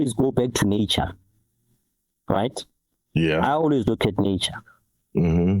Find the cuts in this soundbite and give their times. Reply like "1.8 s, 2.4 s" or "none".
none